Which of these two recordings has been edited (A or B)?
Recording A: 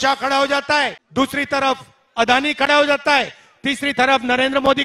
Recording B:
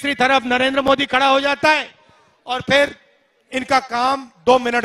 A